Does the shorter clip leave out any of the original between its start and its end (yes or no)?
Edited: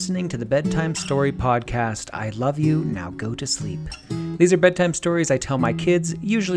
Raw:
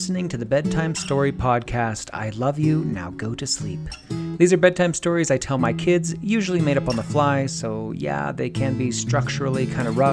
no